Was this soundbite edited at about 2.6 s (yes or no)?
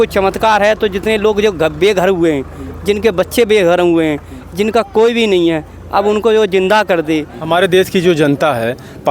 no